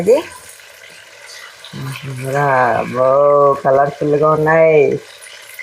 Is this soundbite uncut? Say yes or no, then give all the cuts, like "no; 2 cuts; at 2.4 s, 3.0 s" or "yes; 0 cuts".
yes; 0 cuts